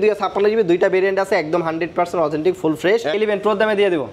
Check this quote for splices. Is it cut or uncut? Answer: cut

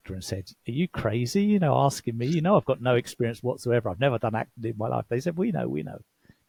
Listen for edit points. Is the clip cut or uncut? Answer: uncut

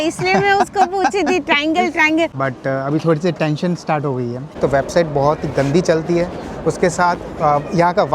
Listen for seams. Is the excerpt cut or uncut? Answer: cut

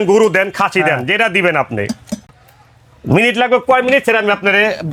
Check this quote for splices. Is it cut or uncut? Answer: uncut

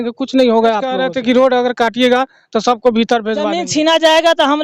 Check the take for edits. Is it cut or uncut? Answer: cut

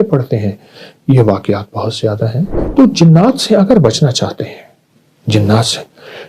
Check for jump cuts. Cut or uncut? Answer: cut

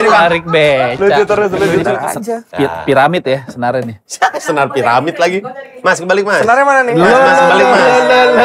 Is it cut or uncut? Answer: cut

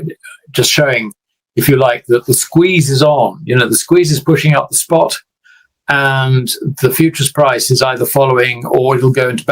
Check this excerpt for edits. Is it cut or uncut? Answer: uncut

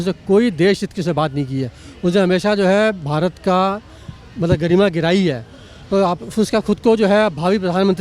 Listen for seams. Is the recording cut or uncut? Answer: uncut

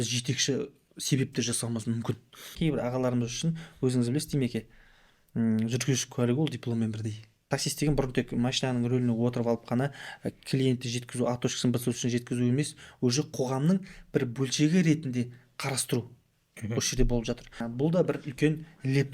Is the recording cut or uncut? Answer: cut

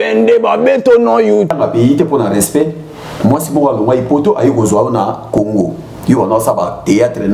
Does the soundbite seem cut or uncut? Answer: cut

